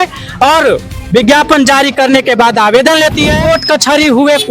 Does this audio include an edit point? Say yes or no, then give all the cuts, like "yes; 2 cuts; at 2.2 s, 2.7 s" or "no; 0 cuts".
yes; 1 cut; at 3.4 s